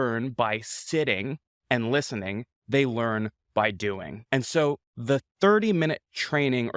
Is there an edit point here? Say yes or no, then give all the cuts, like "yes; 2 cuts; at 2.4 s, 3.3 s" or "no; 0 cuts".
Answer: yes; 2 cuts; at 4.1 s, 4.9 s